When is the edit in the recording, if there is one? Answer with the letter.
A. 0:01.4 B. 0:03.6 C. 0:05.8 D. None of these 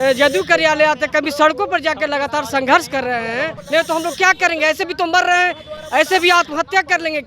B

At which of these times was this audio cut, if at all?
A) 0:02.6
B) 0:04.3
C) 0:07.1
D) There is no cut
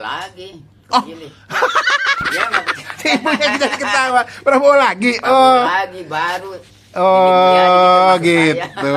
D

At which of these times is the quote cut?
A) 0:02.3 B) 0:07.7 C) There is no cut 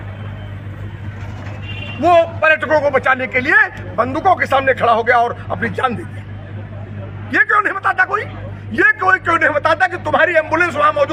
C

